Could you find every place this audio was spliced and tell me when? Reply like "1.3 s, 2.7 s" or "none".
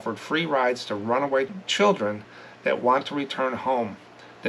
1.5 s